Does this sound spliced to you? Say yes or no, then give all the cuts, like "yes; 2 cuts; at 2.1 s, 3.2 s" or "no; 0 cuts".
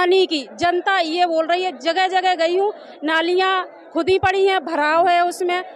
no; 0 cuts